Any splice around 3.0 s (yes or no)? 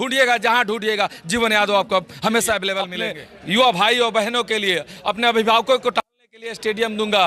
yes